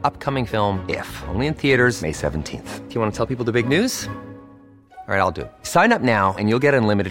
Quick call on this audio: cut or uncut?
uncut